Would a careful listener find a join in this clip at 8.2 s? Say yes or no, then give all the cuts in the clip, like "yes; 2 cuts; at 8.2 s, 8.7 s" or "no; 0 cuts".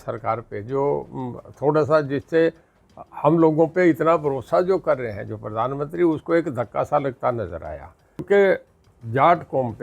yes; 1 cut; at 8.2 s